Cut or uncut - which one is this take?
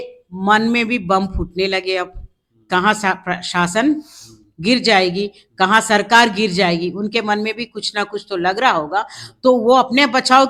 uncut